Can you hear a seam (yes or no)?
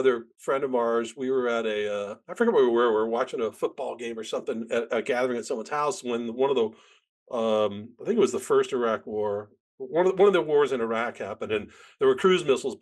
no